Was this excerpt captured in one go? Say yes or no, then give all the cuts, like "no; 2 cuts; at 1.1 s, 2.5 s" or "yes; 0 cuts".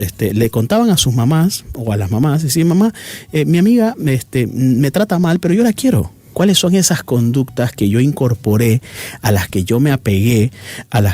no; 1 cut; at 6.3 s